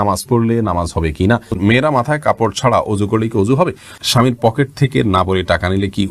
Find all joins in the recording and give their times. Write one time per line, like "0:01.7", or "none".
0:01.6
0:04.0